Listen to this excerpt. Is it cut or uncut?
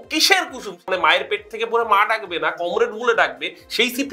cut